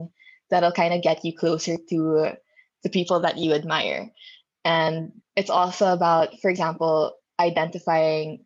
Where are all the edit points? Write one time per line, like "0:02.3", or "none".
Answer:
none

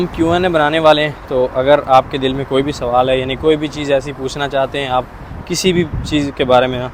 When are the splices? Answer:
none

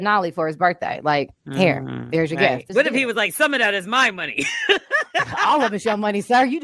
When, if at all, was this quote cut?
0:02.7

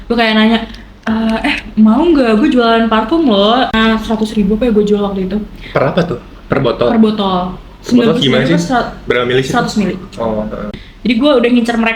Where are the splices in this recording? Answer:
0:03.8
0:10.8

